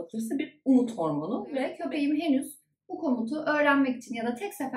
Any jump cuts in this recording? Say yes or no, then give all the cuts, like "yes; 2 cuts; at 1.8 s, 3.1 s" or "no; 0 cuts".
yes; 1 cut; at 1.7 s